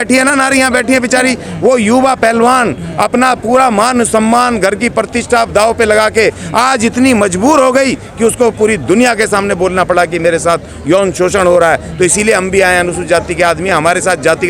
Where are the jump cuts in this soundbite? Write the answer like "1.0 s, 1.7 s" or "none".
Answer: none